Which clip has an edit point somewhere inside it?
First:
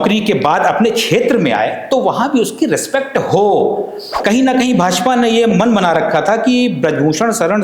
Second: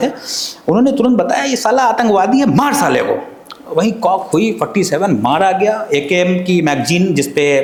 first; 1 cut; at 4.2 s

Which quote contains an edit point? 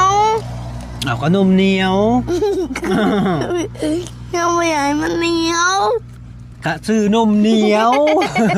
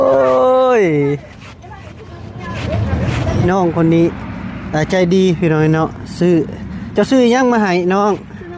second; 1 cut; at 3.4 s

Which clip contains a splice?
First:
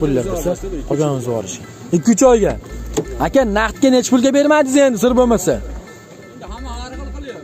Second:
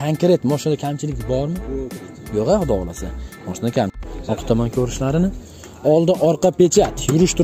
second; 1 cut; at 4.1 s

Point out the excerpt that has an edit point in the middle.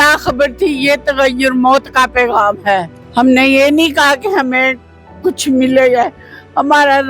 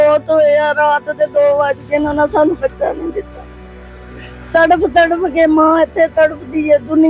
first; 1 cut; at 3.0 s

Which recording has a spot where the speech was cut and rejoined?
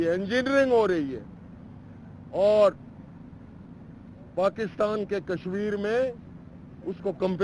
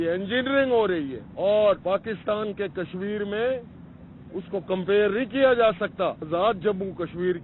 second; 3 cuts; at 1.2 s, 1.8 s, 6.2 s

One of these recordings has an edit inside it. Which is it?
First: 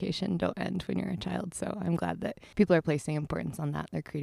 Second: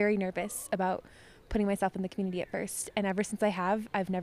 first; 1 cut; at 2.4 s

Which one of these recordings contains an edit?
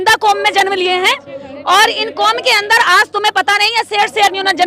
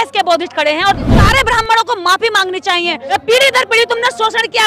second; 2 cuts; at 1.1 s, 3.0 s

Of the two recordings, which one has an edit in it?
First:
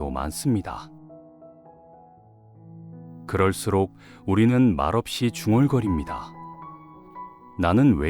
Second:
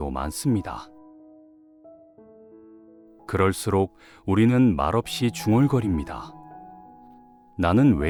first; 2 cuts; at 0.9 s, 3.3 s

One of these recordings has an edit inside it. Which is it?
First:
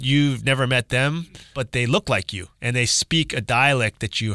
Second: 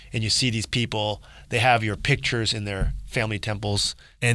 first; 2 cuts; at 1.6 s, 2.5 s

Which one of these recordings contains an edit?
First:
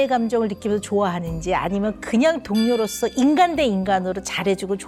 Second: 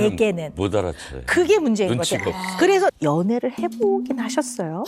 second; 1 cut; at 3.0 s

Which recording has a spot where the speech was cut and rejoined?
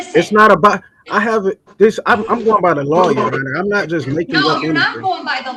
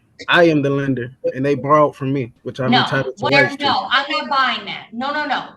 second; 1 cut; at 2.4 s

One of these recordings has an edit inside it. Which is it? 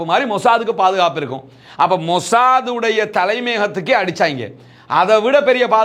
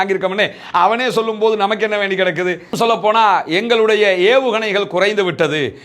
second; 1 cut; at 2.7 s

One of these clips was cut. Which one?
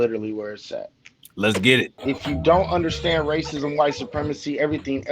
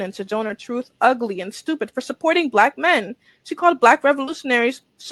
first; 1 cut; at 1.9 s

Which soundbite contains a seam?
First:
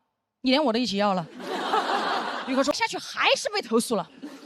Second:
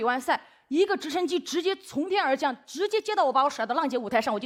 first; 1 cut; at 2.7 s

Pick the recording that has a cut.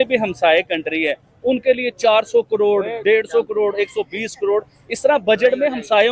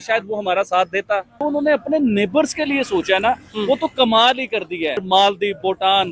second; 2 cuts; at 1.3 s, 5.0 s

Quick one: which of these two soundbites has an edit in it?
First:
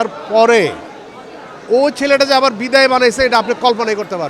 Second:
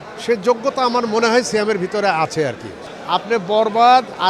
second; 1 cut; at 2.7 s

